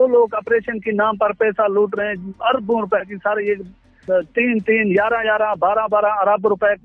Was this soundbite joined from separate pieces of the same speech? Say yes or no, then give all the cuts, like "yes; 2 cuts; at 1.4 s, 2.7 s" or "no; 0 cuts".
yes; 1 cut; at 3.9 s